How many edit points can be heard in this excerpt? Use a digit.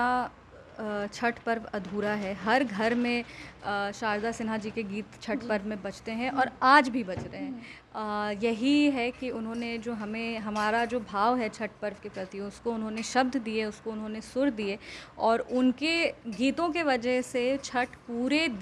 0